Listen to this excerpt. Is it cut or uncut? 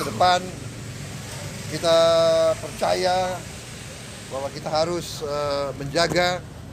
uncut